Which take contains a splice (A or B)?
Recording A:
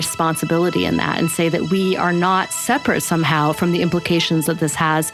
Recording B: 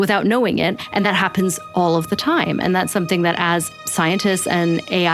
B